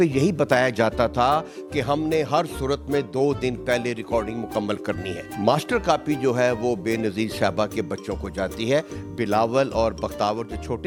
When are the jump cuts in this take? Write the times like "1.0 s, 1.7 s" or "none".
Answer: none